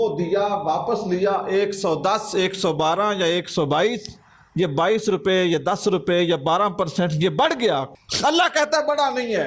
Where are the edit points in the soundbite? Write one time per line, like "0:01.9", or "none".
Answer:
0:08.0